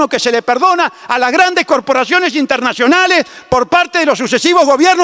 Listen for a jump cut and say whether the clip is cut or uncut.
uncut